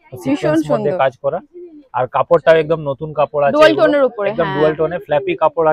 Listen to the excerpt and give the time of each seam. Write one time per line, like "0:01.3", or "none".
none